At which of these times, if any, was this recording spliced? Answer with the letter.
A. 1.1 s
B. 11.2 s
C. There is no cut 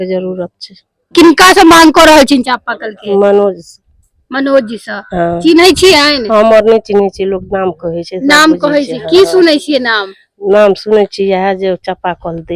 A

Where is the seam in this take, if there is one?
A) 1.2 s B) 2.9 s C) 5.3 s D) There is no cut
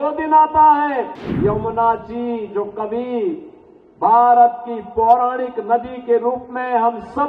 A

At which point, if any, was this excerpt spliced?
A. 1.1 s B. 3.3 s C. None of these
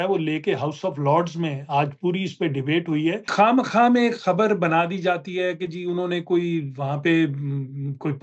B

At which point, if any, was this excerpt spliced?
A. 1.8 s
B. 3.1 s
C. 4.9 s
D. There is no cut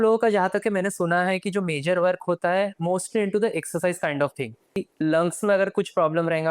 C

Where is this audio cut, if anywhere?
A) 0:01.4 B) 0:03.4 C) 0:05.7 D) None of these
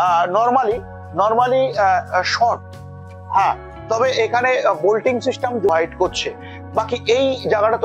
C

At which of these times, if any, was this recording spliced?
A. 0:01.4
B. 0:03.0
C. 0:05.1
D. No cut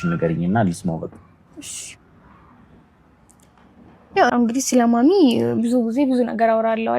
A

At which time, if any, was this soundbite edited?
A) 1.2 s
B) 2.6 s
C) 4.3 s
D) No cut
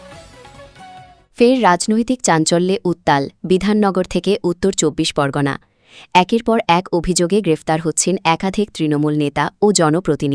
A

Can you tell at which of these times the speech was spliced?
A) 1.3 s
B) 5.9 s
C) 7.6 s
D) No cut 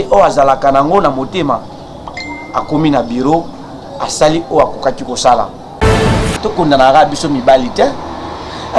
B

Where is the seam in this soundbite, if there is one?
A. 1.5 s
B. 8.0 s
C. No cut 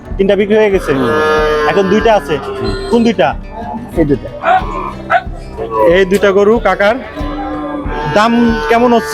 C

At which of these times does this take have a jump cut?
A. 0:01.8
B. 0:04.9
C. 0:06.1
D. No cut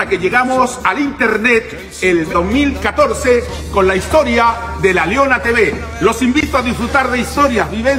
D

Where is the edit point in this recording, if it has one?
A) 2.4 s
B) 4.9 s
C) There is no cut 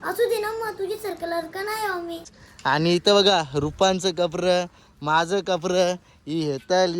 A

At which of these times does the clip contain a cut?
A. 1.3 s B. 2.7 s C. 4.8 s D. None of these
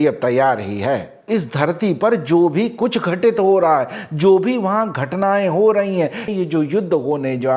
A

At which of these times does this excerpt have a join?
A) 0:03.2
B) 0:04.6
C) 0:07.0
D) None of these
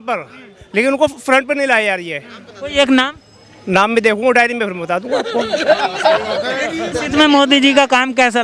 C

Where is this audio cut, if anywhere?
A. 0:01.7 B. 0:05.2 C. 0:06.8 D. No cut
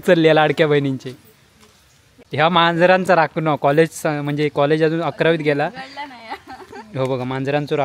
D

